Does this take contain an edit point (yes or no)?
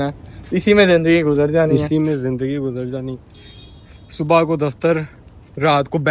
no